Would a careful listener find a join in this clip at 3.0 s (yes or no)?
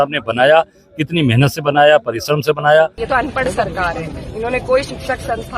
yes